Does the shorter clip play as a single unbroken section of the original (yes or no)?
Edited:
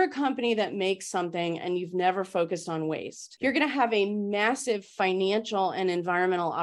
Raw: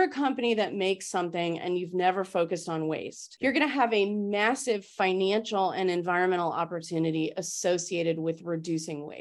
yes